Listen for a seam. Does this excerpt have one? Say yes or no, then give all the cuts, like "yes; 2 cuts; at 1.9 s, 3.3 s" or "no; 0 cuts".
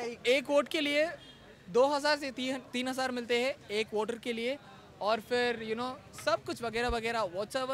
no; 0 cuts